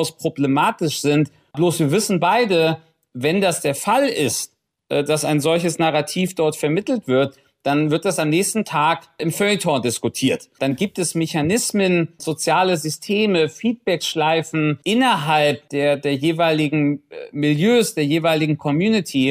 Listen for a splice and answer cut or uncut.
uncut